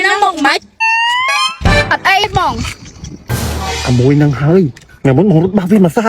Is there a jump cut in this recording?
yes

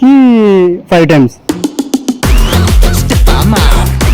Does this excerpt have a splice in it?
yes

